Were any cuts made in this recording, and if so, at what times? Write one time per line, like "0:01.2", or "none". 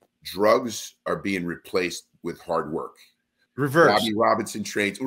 0:03.4